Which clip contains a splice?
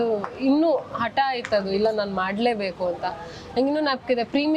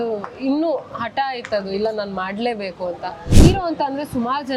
second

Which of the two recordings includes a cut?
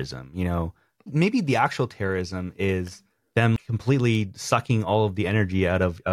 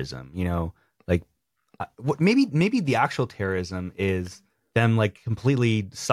first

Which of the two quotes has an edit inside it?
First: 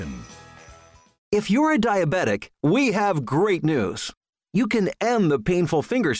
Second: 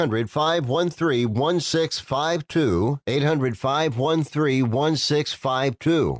first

